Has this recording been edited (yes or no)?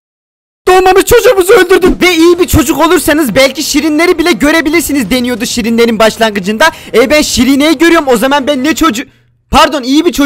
yes